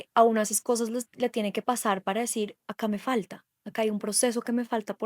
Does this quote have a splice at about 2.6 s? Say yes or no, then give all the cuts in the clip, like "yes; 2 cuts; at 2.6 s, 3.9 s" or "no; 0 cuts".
yes; 1 cut; at 2.6 s